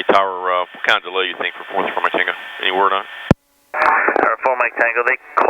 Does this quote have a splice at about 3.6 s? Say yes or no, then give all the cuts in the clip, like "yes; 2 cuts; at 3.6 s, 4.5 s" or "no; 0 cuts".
yes; 1 cut; at 3.6 s